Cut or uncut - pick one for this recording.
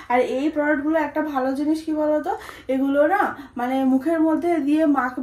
uncut